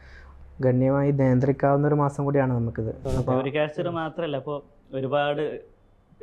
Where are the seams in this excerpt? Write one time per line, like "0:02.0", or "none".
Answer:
0:03.0